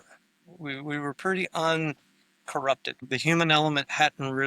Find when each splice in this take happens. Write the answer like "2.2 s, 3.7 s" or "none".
3.0 s